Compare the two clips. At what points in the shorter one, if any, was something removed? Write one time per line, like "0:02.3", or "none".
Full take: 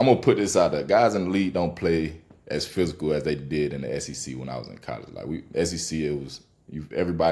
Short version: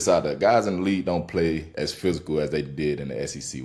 0:01.7